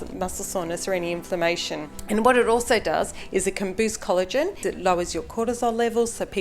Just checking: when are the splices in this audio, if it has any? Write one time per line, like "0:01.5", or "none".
0:01.9
0:04.6